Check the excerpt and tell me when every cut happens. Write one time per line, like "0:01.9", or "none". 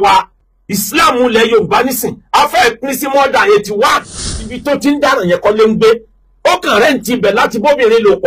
0:04.5